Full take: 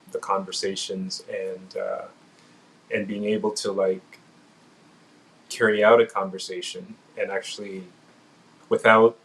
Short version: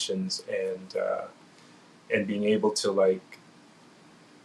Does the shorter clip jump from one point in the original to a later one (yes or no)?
no